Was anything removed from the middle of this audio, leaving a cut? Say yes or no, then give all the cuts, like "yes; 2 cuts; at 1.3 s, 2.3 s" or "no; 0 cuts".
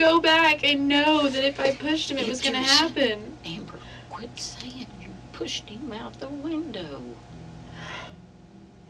no; 0 cuts